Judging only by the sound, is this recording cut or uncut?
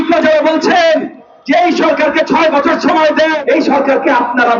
cut